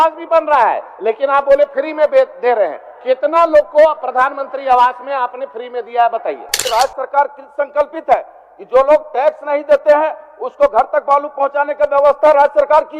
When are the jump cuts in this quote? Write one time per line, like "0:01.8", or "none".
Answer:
0:06.6